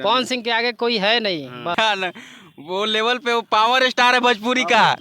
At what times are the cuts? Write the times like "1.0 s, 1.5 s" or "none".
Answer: 1.8 s